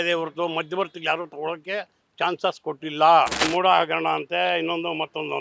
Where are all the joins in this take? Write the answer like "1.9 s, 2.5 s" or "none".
3.4 s